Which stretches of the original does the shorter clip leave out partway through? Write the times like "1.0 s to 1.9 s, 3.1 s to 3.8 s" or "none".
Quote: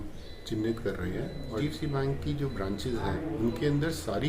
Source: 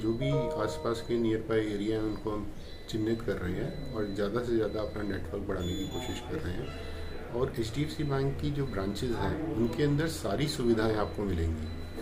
4.0 s to 7.8 s